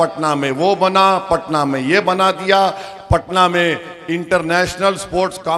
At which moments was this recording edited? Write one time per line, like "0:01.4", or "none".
none